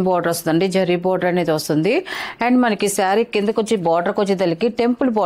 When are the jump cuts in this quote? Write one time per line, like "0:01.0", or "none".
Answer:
none